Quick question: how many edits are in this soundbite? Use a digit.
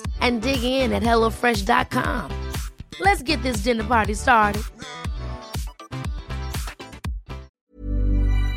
1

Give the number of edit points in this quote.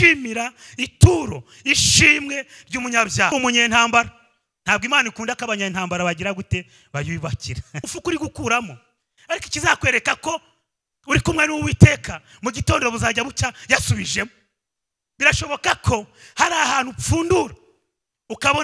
2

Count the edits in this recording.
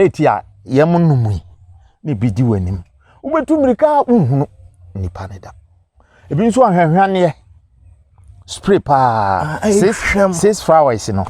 0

